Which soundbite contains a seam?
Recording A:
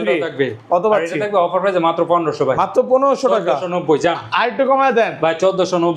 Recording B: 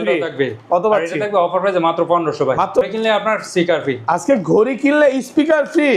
B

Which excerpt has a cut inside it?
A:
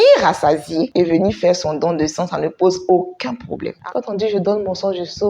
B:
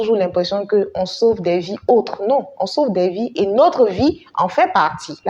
A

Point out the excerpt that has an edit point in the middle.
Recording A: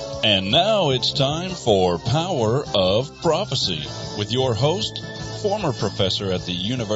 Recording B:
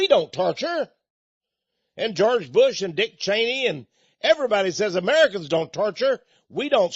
B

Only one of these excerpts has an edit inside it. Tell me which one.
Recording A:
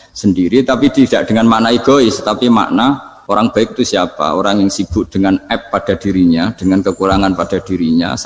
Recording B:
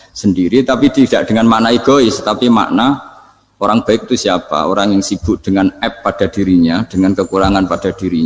A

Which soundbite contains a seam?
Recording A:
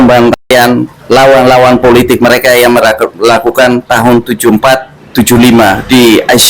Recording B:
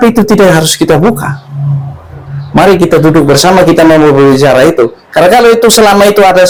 A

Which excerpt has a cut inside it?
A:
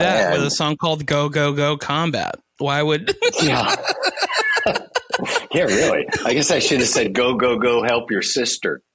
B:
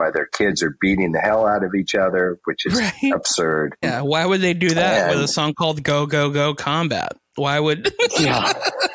B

